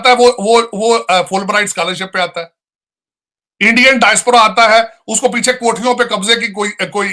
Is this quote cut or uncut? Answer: uncut